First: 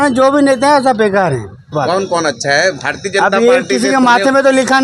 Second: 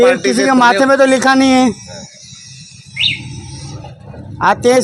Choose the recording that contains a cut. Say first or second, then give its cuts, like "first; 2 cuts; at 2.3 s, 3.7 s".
first; 1 cut; at 1.7 s